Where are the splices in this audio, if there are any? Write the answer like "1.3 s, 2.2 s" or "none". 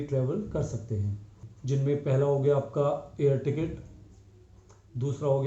1.5 s